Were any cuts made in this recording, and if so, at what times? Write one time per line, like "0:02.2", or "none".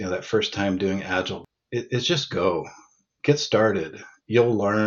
0:01.4